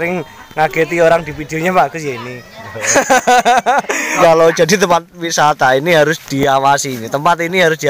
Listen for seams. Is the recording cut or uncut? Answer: cut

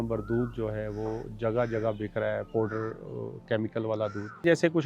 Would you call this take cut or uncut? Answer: uncut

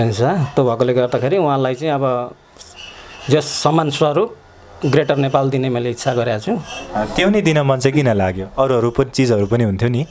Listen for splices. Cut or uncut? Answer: uncut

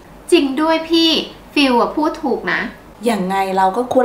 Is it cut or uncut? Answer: uncut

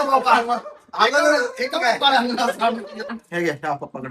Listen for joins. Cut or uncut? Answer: cut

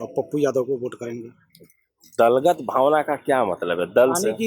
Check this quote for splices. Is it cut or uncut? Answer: uncut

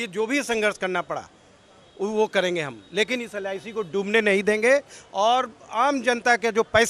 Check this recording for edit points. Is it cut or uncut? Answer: uncut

